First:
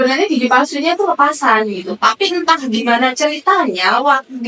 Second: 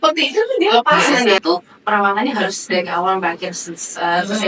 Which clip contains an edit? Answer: second; 1 cut; at 1.4 s

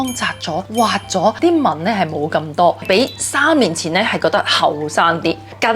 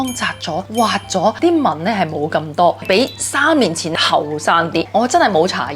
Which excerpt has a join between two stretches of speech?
second; 2 cuts; at 3.9 s, 4.9 s

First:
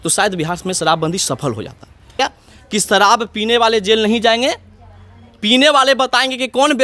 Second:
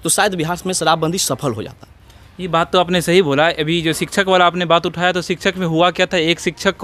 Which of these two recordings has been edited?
first; 1 cut; at 2.2 s

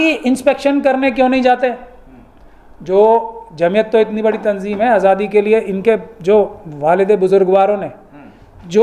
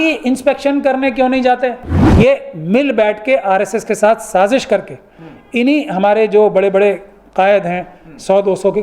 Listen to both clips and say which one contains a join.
second; 1 cut; at 2.0 s

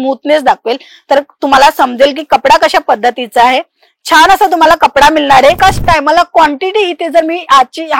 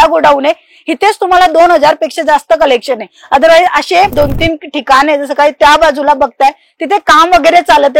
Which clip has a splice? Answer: first; 1 cut; at 5.6 s

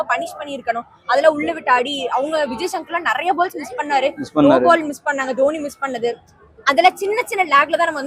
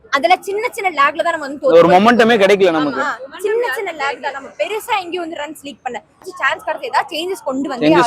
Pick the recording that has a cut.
second; 1 cut; at 6.3 s

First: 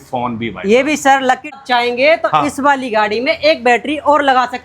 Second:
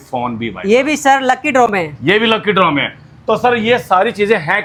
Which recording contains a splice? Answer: first; 1 cut; at 1.5 s

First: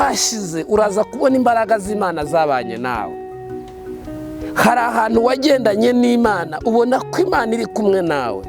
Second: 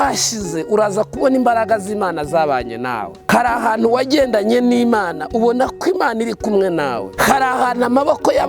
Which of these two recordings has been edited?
second; 2 cuts; at 3.3 s, 7.1 s

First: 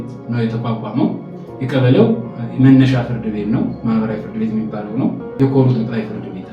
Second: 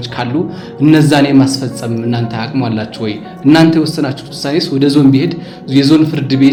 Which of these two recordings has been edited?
first; 1 cut; at 5.2 s

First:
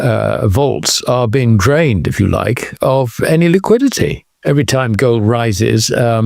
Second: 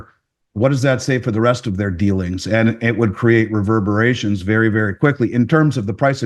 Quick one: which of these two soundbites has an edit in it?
first; 1 cut; at 4.3 s

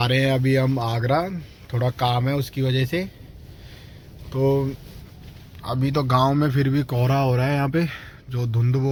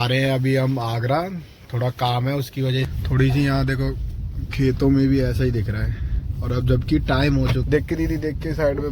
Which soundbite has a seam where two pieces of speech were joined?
second; 2 cuts; at 2.9 s, 7.6 s

